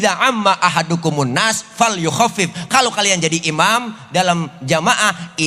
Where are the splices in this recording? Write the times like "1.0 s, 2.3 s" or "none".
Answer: none